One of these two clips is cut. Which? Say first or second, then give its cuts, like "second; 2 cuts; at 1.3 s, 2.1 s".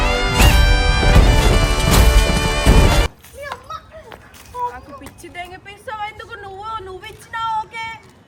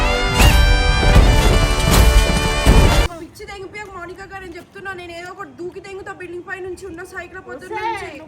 second; 1 cut; at 3.1 s